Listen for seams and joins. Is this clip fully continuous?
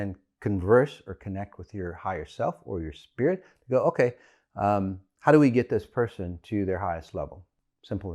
yes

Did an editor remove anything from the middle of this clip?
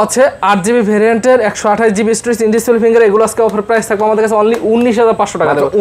no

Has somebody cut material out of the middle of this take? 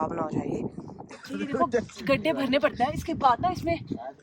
yes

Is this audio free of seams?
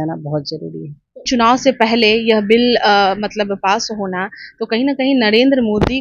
no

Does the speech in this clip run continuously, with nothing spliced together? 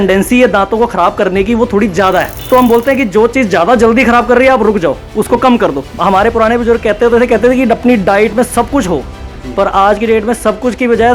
no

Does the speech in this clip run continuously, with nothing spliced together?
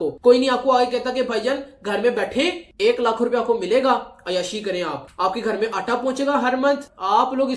yes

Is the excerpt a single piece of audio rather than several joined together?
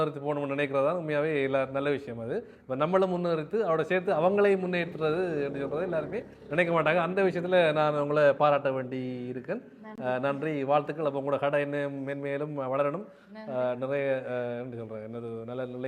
yes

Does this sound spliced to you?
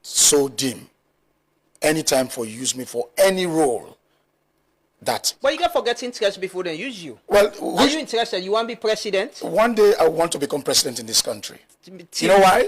no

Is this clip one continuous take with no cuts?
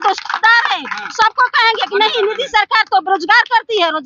yes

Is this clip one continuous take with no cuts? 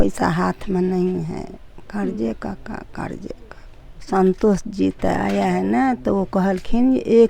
no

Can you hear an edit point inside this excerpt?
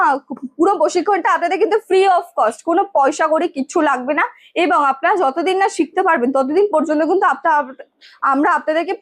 no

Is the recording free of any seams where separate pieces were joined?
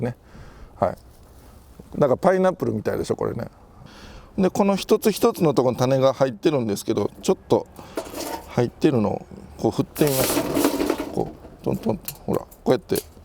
no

